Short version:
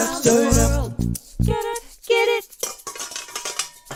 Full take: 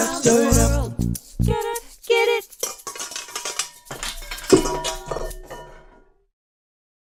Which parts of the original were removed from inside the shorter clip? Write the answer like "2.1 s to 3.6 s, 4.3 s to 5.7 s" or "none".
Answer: none